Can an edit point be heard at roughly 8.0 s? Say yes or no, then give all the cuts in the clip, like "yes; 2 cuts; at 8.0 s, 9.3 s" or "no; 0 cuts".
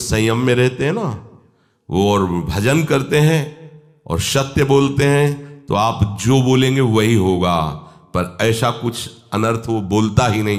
no; 0 cuts